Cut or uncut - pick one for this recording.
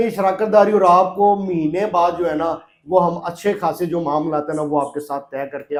uncut